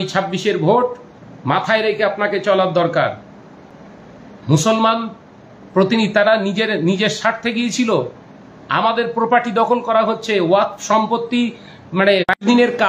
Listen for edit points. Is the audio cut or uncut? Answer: uncut